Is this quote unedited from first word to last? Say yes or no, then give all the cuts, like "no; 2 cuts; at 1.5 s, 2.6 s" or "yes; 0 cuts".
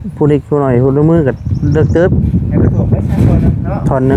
yes; 0 cuts